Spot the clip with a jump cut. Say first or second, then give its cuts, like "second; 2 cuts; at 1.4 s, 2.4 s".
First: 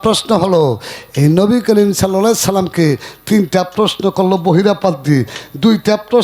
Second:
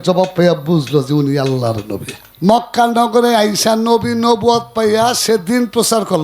second; 1 cut; at 2.1 s